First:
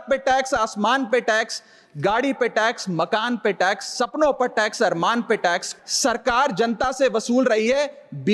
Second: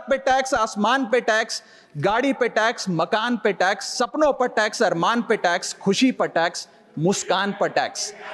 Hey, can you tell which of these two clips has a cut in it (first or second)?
first